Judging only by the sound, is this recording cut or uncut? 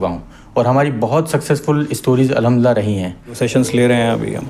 cut